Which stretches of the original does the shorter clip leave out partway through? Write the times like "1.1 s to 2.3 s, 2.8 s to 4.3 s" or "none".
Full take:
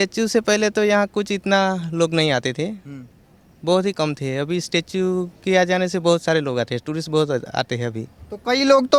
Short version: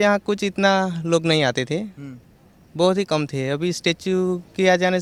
none